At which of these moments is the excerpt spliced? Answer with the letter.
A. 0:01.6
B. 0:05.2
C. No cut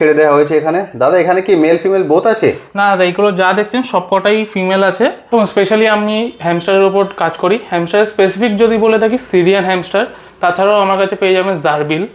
B